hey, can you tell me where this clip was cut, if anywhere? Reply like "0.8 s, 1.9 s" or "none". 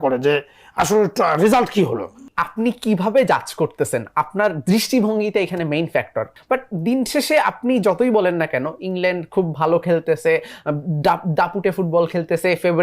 2.4 s, 6.4 s